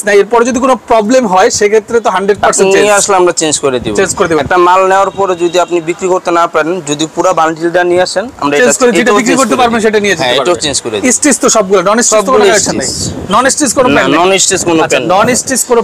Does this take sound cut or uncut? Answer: uncut